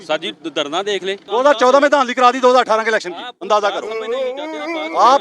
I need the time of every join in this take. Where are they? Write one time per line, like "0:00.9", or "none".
0:01.2